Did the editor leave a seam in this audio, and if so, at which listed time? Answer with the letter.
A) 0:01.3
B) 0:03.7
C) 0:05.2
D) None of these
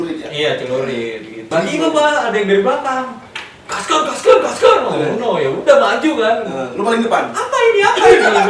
A